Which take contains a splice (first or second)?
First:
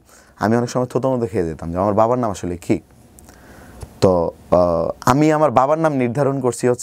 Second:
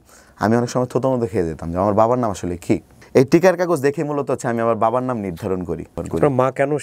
second